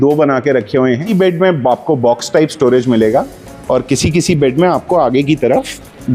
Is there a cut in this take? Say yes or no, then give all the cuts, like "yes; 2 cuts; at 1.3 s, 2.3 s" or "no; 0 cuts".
yes; 1 cut; at 1.1 s